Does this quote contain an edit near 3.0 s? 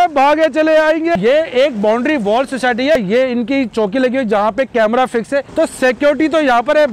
yes; 3 cuts; at 1.1 s, 3.0 s, 5.5 s

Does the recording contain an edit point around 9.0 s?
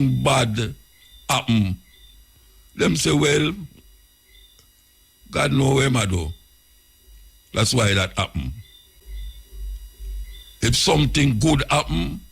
yes; 1 cut; at 9.0 s

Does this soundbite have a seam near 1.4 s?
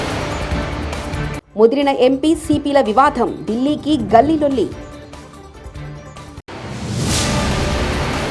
yes; 1 cut; at 1.4 s

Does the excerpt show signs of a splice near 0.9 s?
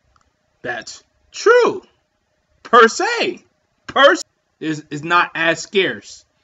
no; 1 cut; at 4.2 s

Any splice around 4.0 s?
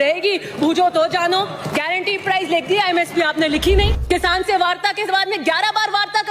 yes; 1 cut; at 4.0 s

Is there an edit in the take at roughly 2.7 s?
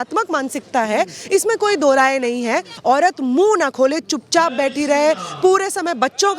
yes; 1 cut; at 2.7 s

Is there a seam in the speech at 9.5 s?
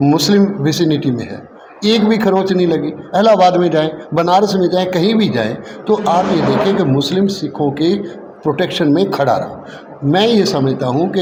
no; 0 cuts

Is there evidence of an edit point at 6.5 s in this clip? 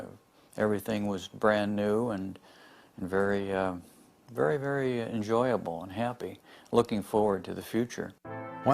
no; 0 cuts

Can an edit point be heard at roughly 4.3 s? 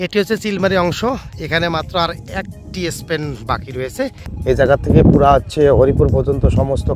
yes; 1 cut; at 4.3 s

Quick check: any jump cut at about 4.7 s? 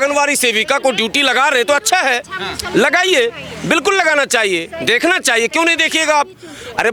no; 0 cuts

